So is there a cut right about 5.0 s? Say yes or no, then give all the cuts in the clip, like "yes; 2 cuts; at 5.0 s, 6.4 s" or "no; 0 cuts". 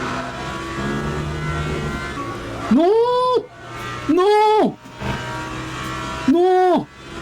no; 1 cut; at 2.2 s